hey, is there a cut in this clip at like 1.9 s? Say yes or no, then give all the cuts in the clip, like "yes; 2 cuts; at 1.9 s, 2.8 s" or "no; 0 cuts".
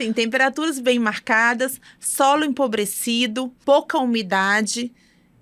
no; 1 cut; at 3.6 s